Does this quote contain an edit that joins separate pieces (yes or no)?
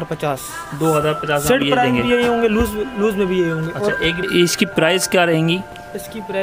yes